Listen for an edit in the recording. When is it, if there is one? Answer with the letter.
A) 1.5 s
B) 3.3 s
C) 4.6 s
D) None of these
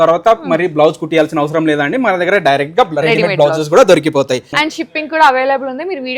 C